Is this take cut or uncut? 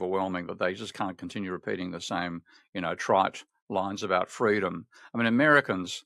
uncut